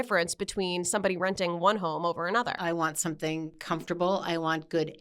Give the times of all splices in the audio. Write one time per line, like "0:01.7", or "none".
0:02.5
0:03.6